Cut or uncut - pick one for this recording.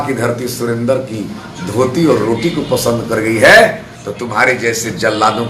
uncut